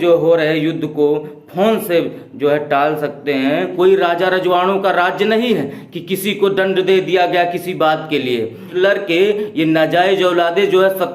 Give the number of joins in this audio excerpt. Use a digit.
2